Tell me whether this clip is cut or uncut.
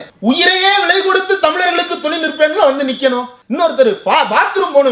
cut